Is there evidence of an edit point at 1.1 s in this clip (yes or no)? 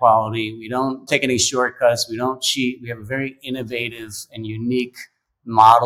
yes